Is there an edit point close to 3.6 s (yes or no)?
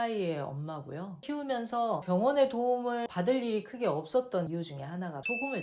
no